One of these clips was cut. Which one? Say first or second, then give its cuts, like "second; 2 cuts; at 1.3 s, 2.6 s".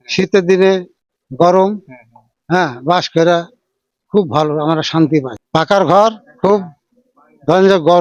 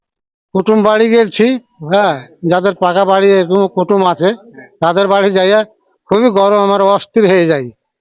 first; 1 cut; at 5.4 s